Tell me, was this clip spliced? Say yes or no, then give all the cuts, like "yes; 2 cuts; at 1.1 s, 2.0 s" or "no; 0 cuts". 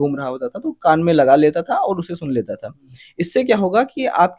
no; 0 cuts